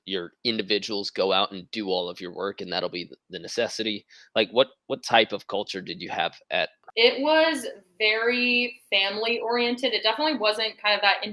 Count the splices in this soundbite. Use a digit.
1